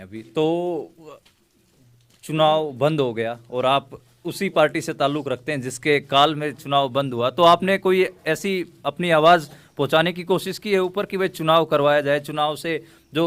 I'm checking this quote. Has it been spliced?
no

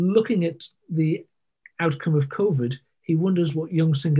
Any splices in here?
no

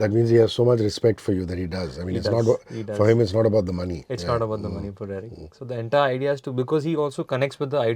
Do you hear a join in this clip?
no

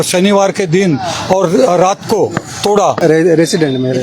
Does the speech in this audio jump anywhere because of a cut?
yes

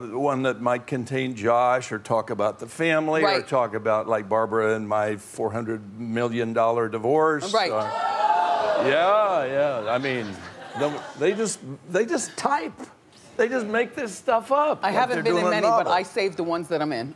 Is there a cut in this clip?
no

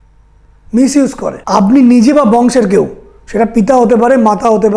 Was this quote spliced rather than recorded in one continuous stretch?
yes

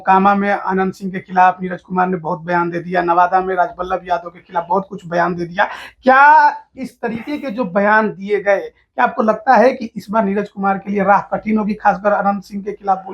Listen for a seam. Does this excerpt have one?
no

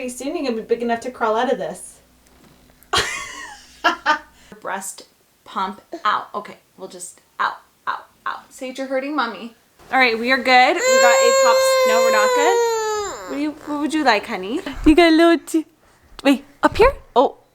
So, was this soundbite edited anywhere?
yes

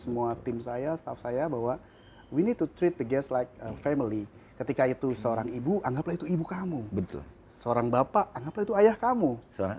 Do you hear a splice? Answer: no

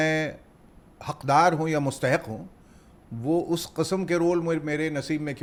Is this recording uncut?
yes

